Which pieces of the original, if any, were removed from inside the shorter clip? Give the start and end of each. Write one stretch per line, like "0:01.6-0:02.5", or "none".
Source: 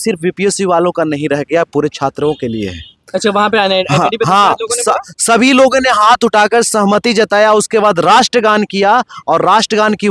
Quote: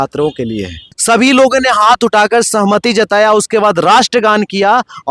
0:02.9-0:05.1